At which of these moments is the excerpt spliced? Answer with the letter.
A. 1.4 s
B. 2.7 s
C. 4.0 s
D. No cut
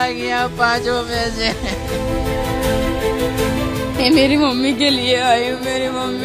D